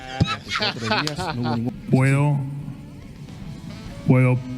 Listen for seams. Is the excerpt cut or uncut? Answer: cut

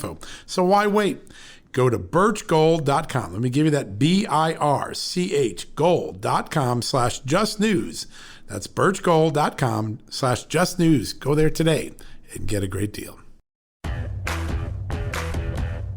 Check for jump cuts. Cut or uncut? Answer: cut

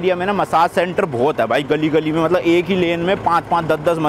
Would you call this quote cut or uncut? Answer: uncut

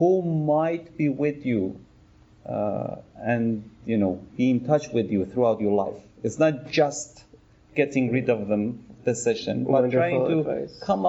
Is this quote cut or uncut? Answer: uncut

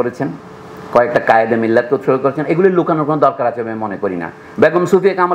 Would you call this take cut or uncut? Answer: uncut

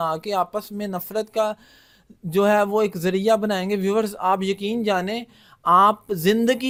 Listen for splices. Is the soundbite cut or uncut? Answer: uncut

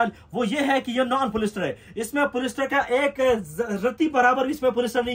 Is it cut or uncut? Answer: uncut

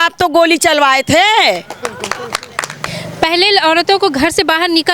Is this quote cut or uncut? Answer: cut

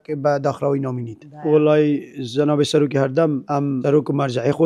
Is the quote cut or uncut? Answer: cut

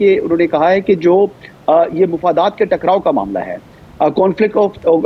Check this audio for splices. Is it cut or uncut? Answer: uncut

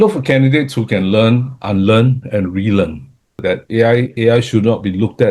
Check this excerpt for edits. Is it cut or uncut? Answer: cut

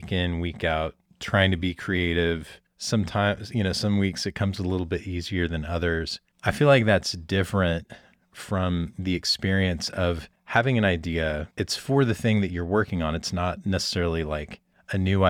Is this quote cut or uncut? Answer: uncut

